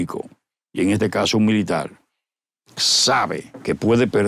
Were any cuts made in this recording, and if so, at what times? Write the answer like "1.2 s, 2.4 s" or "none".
none